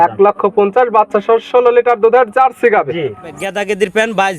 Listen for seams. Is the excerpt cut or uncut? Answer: cut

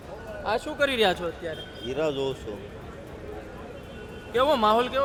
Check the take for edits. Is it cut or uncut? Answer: uncut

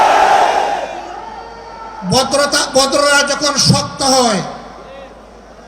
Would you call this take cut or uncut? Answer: uncut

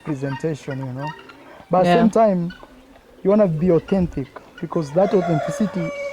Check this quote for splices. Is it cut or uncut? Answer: uncut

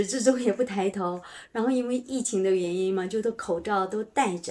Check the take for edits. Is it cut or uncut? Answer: uncut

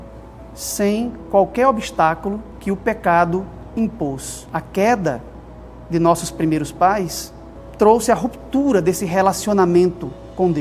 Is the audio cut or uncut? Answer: cut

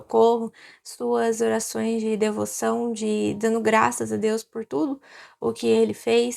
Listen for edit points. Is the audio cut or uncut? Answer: uncut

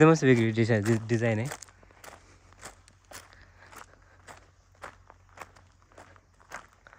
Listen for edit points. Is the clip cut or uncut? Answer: uncut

